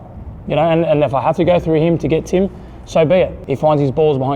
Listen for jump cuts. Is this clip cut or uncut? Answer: cut